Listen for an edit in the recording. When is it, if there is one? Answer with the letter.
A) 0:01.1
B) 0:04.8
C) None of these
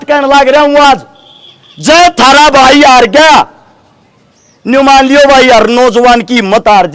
C